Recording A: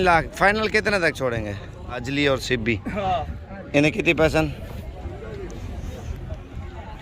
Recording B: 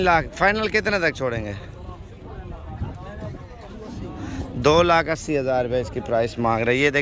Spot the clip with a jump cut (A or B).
A